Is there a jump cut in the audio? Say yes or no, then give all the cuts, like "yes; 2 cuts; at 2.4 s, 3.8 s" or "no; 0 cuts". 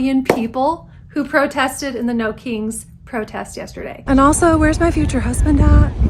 yes; 1 cut; at 4.0 s